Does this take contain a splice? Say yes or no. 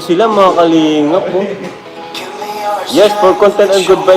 yes